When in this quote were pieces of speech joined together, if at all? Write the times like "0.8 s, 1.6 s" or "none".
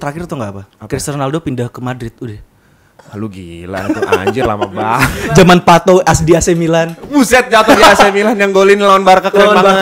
none